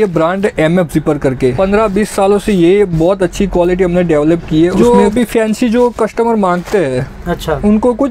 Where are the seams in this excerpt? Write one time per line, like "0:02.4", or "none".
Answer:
0:01.5
0:04.8